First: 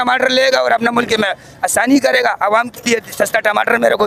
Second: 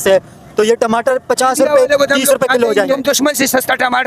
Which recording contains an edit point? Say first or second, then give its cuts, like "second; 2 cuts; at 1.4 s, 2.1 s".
second; 1 cut; at 2.9 s